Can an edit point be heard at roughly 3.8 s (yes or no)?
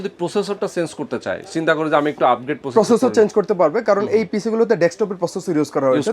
no